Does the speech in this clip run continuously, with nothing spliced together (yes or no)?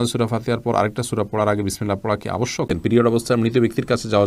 no